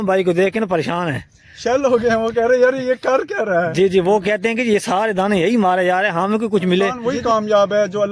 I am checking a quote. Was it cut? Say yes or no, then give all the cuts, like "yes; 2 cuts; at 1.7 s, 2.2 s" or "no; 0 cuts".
yes; 1 cut; at 7.0 s